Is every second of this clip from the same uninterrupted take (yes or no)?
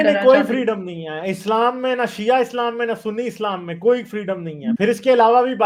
yes